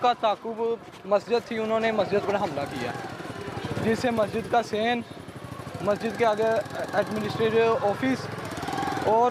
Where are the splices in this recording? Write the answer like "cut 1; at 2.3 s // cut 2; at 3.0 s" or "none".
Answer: none